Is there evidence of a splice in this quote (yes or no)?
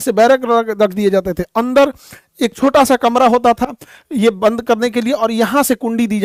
no